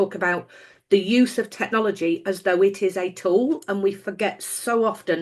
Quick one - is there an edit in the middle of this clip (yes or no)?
no